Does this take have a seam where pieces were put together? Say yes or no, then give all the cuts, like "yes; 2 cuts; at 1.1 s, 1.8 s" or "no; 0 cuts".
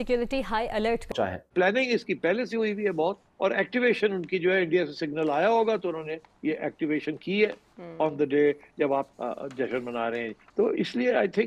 yes; 1 cut; at 1.1 s